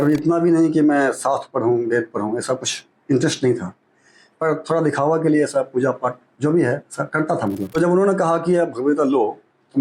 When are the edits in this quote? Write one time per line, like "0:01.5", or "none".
0:07.8

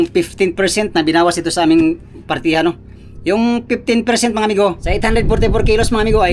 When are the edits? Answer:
0:04.8

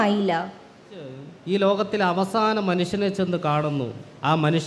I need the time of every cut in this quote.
0:01.3

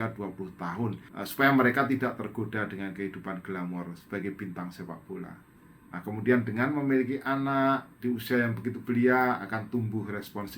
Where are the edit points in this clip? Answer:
0:01.1

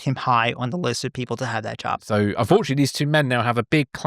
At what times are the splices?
0:02.0

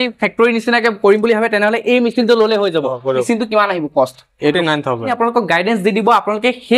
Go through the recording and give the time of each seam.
0:03.2
0:04.5

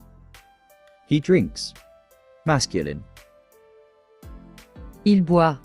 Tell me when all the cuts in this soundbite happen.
0:01.1

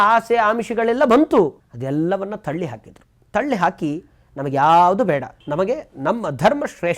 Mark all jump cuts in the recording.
0:01.7
0:05.4

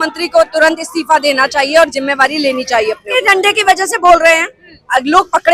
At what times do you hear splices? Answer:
none

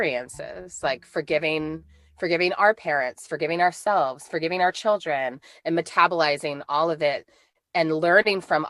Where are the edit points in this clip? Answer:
none

